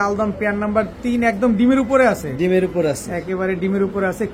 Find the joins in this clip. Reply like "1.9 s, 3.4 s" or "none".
none

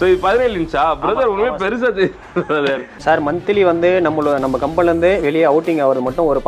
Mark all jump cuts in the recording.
2.9 s

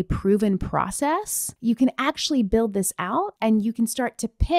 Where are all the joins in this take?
1.5 s

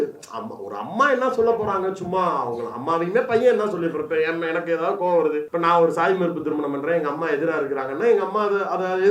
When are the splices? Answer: 5.5 s

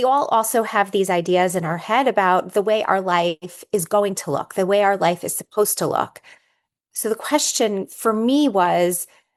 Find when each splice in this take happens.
none

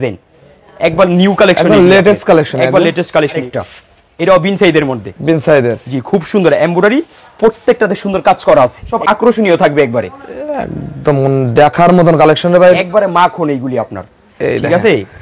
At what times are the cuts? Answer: 3.5 s, 8.9 s, 12.8 s

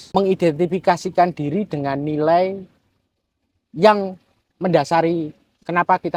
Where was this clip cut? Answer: none

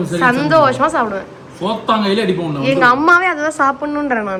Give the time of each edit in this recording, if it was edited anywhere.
none

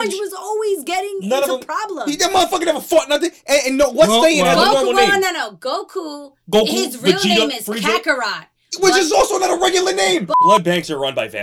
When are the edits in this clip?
10.4 s

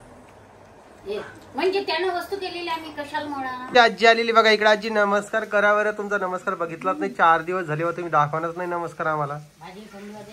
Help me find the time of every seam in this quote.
3.6 s

